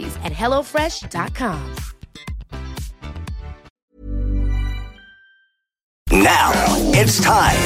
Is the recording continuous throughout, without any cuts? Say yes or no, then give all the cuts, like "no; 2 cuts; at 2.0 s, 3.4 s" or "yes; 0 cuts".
no; 2 cuts; at 3.8 s, 6.1 s